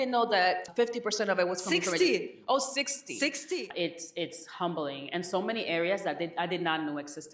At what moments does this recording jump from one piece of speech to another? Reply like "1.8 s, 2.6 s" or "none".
3.4 s